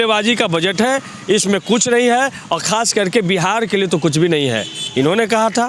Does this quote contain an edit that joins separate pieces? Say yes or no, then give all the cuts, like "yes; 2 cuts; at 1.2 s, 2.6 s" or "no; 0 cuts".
no; 0 cuts